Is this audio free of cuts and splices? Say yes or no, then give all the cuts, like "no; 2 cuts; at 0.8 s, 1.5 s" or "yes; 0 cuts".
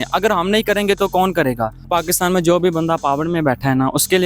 no; 1 cut; at 1.9 s